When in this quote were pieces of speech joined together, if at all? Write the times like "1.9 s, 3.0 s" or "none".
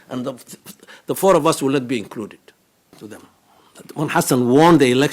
3.1 s